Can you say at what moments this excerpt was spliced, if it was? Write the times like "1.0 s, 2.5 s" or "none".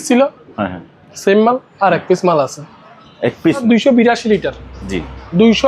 3.6 s